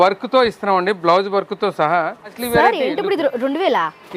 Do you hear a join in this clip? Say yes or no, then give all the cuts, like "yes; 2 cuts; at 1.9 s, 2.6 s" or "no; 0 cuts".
yes; 1 cut; at 2.4 s